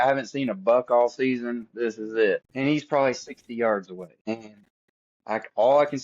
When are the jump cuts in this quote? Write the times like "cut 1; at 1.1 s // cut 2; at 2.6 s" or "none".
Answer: cut 1; at 2.5 s // cut 2; at 4.2 s